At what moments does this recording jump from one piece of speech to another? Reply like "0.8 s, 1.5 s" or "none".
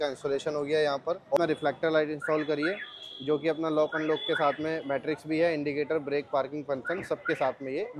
1.4 s